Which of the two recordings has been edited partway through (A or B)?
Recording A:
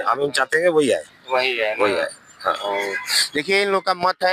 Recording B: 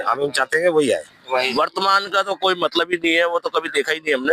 B